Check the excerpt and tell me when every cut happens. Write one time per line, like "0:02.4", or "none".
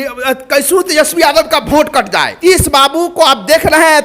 0:02.3